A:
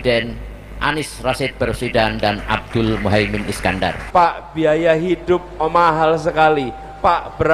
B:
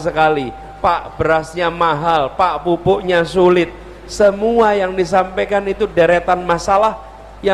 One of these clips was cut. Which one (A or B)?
A